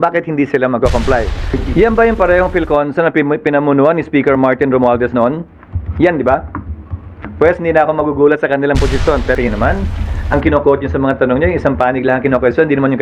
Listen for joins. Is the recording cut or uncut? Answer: cut